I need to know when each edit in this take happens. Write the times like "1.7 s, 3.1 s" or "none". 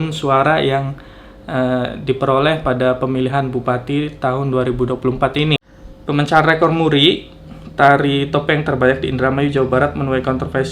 5.6 s